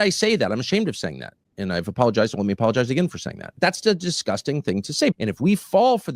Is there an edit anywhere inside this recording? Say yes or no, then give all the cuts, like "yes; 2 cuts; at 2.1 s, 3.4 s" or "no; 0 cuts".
yes; 2 cuts; at 3.5 s, 5.1 s